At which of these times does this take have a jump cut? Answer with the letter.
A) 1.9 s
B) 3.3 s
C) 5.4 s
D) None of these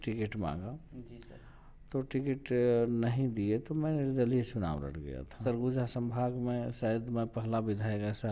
C